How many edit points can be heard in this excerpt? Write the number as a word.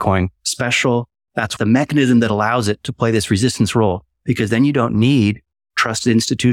one